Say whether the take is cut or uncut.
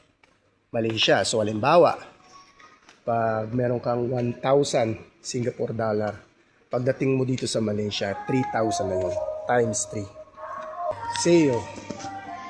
cut